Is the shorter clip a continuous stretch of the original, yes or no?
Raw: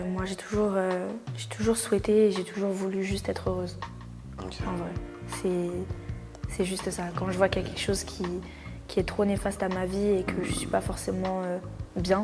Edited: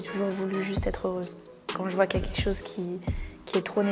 no